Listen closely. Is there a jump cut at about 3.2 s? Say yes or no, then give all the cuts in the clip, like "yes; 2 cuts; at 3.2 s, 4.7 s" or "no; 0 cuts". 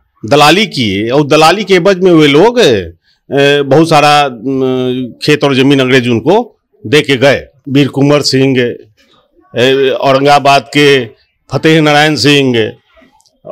no; 1 cut; at 7.6 s